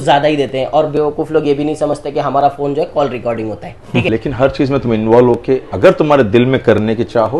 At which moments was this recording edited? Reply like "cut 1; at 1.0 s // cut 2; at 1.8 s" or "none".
cut 1; at 4.1 s